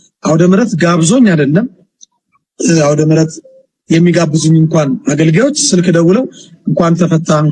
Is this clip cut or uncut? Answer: uncut